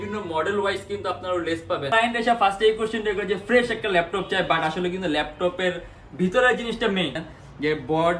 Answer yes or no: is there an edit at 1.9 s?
yes